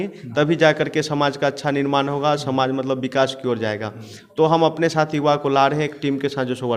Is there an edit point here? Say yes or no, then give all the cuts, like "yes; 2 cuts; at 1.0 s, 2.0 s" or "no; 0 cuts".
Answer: no; 0 cuts